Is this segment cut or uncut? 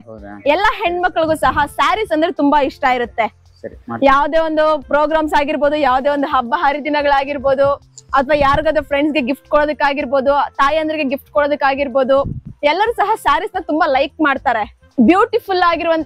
cut